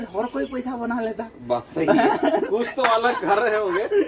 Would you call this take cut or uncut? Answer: uncut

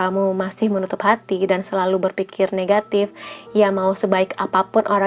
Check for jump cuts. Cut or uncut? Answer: uncut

